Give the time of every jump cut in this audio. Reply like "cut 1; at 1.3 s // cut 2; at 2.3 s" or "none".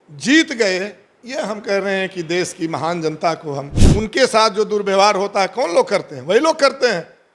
cut 1; at 3.7 s